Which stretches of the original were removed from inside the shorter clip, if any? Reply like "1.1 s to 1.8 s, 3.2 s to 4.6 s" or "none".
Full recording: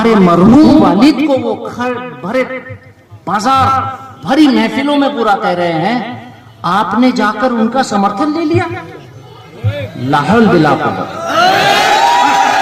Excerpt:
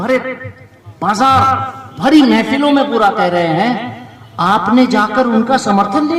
none

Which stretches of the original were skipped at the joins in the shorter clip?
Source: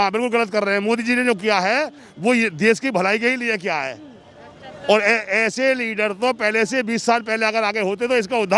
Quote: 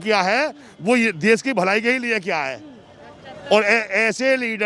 none

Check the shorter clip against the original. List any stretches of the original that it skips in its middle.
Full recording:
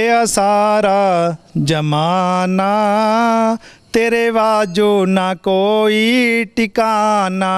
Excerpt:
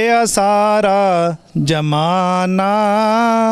none

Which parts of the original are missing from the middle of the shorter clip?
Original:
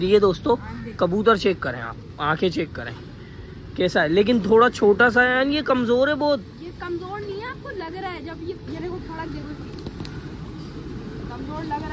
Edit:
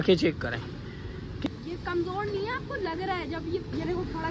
3.8 s to 6.4 s

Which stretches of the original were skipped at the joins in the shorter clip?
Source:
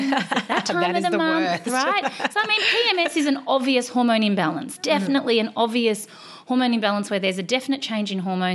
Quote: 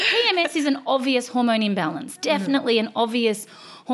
none

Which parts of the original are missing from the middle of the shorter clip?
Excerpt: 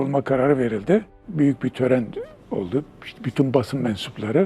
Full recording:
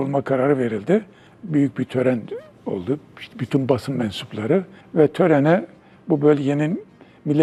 1.2 s to 1.3 s

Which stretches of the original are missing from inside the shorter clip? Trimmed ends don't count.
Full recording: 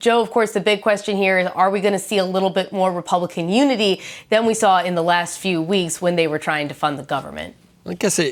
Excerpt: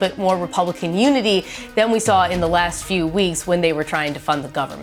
none

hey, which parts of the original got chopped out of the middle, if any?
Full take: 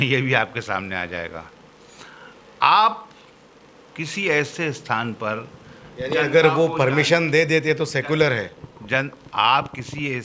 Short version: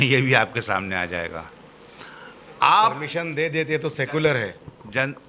3.2 s to 7.1 s

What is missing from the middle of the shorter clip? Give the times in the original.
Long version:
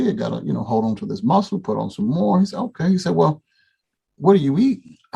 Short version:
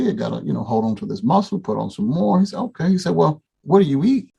3.5 s to 4.0 s

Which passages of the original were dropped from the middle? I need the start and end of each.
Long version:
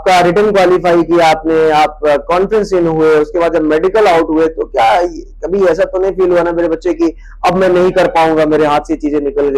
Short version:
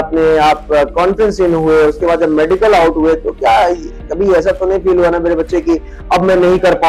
none

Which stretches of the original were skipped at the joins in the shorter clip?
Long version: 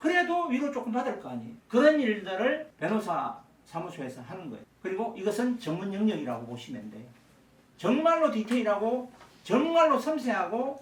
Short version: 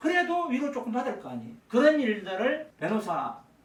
none

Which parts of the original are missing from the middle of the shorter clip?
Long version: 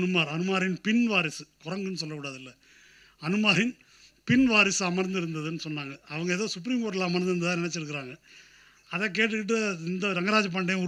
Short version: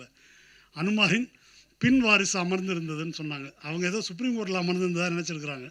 none

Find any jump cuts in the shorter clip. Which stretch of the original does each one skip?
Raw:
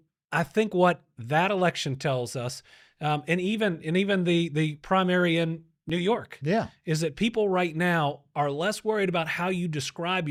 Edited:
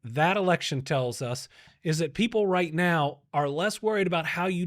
2.9 s to 6.8 s

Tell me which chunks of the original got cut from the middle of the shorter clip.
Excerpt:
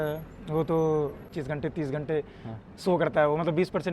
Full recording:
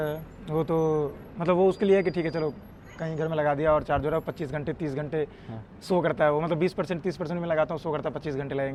1.3 s to 4.3 s

